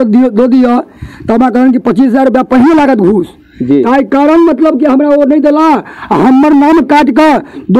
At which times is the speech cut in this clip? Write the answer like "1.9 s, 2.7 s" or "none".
none